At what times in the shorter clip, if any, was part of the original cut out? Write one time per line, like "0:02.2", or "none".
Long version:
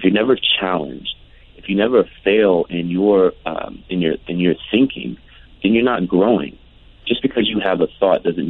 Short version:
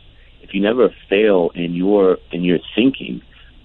0:02.3